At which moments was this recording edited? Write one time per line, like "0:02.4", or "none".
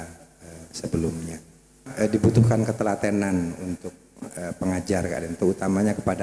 0:01.8